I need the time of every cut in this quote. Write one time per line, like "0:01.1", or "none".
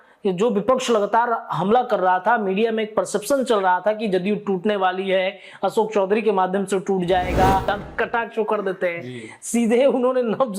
0:07.7